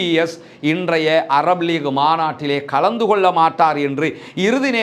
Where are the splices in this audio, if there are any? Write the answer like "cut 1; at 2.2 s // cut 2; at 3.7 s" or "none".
none